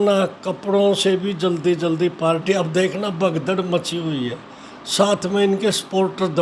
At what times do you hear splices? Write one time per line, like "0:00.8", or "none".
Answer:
none